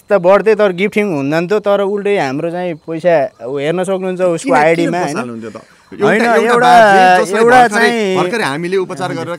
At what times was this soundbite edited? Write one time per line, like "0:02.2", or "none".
none